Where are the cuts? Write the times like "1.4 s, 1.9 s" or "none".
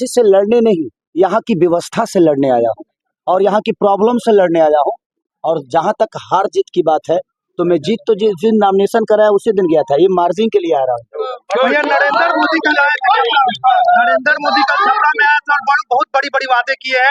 none